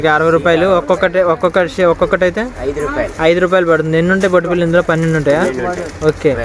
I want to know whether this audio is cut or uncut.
uncut